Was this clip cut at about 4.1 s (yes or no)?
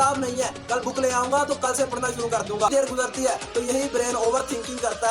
no